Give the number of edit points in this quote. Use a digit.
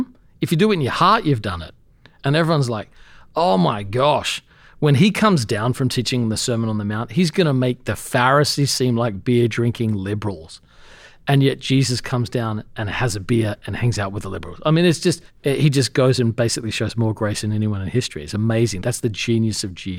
2